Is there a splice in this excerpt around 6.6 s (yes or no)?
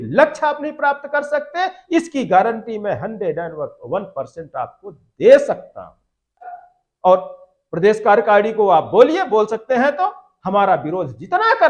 yes